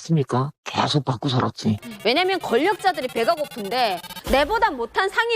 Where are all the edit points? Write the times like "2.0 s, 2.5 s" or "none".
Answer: 1.9 s

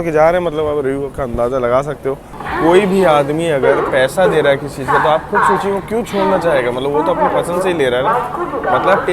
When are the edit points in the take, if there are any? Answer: 2.3 s

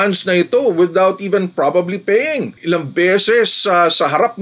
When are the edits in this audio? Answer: 2.6 s

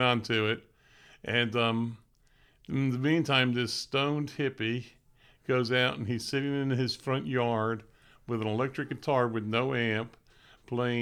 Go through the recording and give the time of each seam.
none

